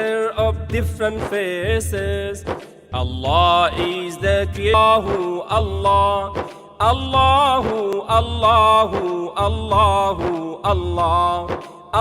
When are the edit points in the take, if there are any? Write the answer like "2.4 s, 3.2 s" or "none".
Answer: 2.7 s, 4.7 s